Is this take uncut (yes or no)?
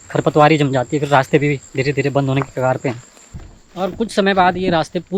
no